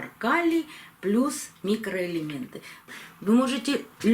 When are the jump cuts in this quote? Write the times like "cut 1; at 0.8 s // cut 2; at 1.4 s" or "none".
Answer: cut 1; at 2.8 s